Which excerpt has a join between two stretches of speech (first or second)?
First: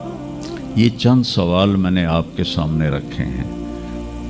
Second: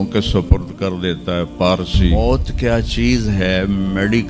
second